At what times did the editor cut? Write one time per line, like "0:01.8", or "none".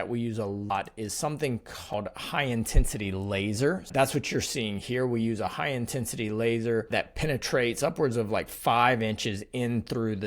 0:00.7
0:01.9
0:03.9
0:06.9